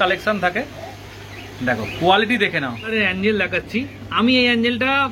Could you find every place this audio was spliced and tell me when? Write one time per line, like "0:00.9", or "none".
0:02.9